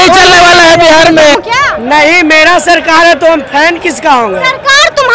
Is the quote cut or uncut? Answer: cut